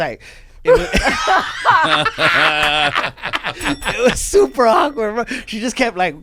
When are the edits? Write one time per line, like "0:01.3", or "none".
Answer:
none